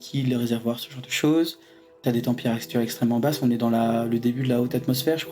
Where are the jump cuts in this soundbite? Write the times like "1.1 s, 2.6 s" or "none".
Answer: 2.0 s